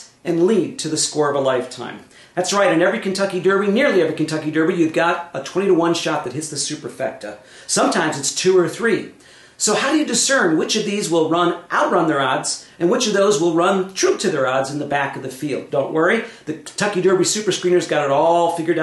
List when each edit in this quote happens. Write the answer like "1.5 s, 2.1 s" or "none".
13.6 s